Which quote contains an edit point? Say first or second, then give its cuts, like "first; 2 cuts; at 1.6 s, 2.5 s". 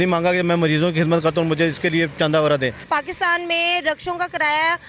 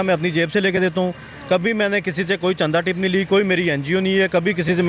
first; 1 cut; at 2.9 s